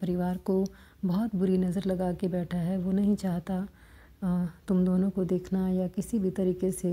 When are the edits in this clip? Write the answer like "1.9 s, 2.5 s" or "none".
none